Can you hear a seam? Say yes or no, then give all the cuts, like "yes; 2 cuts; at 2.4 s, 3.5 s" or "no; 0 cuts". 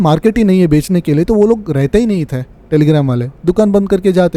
no; 0 cuts